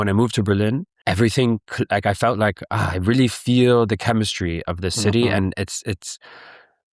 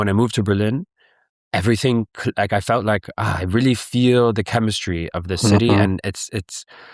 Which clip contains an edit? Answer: first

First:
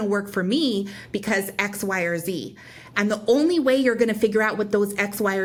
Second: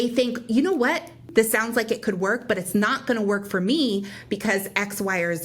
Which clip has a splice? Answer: second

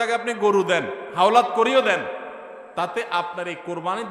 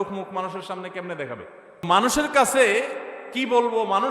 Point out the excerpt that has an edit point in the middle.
second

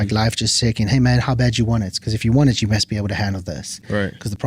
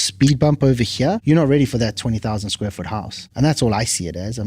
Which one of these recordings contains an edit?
second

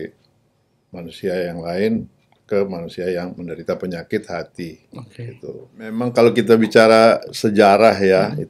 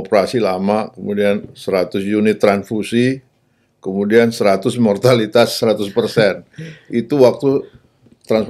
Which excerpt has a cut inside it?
first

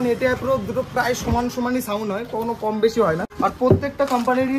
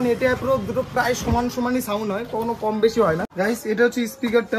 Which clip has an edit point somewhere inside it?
second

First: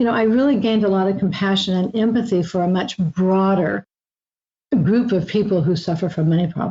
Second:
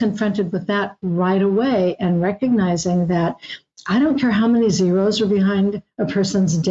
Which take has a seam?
first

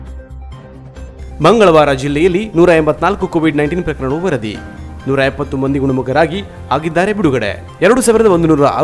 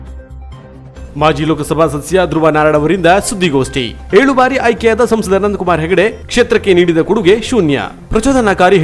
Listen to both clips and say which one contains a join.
second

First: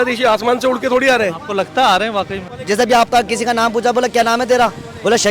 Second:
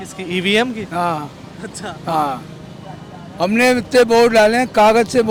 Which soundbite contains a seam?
first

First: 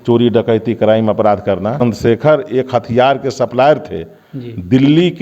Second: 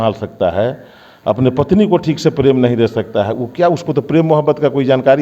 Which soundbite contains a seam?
first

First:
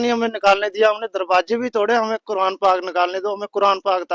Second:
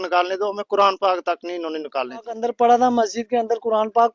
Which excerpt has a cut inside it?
second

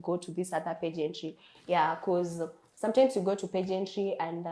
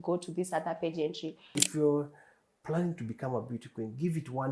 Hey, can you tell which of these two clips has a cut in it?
second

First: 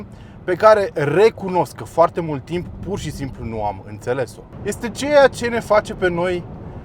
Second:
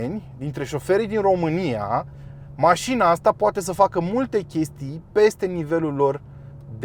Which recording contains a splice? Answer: first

